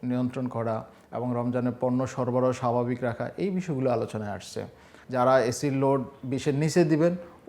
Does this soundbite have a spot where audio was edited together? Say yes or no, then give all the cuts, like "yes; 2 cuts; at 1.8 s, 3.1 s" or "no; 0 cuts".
yes; 1 cut; at 4.9 s